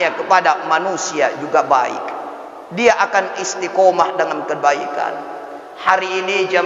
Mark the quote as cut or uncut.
uncut